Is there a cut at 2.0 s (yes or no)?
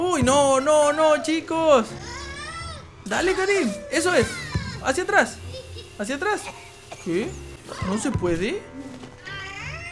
no